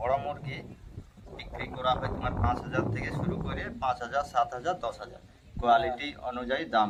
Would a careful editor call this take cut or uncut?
uncut